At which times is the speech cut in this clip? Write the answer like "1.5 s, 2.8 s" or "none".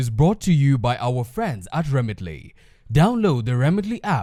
none